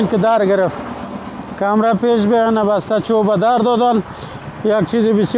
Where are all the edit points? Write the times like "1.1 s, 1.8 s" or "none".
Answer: none